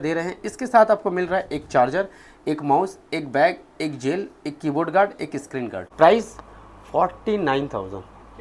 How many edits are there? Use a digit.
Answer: 1